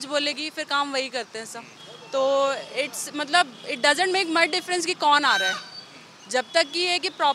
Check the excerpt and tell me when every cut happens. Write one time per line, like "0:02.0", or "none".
none

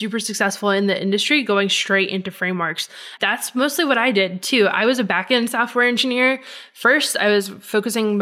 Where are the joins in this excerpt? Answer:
0:03.1

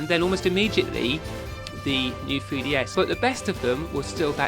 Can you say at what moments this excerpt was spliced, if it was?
0:02.9

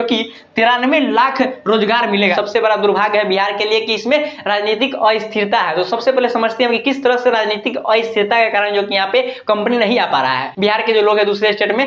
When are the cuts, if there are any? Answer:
0:02.2
0:10.5

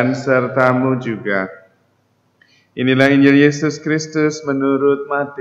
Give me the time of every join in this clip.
none

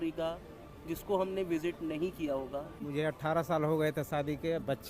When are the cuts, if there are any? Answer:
0:02.8

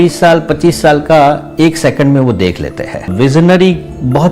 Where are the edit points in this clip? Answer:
0:03.1

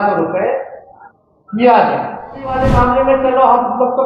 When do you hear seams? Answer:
0:02.5

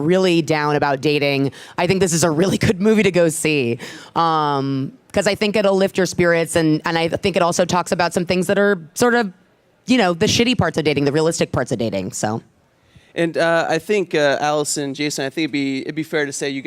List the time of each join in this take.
none

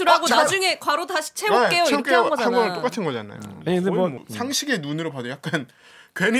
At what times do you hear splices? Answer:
0:04.2

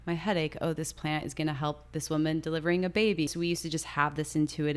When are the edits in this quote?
0:03.3

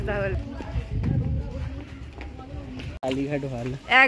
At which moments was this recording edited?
0:02.9

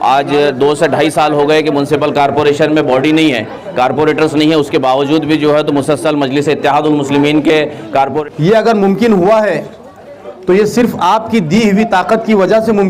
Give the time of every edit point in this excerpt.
0:08.2

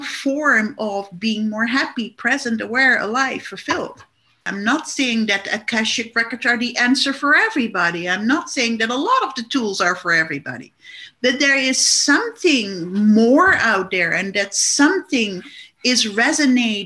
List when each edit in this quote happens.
0:04.5

